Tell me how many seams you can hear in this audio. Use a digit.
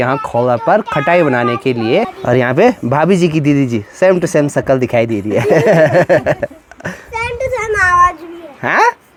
0